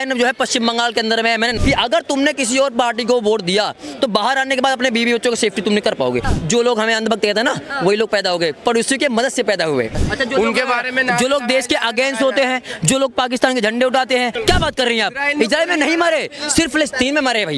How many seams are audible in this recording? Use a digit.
4